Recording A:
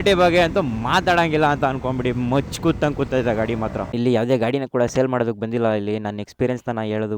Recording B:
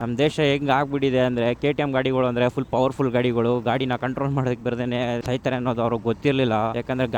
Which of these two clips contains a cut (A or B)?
A